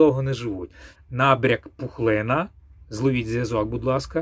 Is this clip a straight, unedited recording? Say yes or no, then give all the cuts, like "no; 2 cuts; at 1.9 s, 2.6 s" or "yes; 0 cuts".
no; 1 cut; at 1.0 s